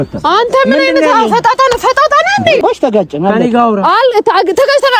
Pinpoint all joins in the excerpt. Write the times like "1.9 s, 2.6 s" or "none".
2.6 s